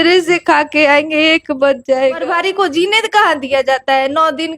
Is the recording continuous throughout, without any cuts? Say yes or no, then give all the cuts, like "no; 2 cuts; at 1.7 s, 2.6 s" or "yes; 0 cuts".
no; 1 cut; at 2.3 s